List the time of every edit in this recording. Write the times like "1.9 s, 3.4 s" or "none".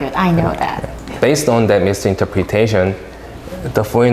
1.0 s